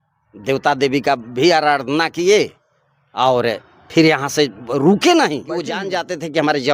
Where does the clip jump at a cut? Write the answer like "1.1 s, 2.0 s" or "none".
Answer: 5.8 s